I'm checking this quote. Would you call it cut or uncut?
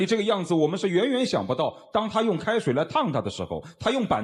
uncut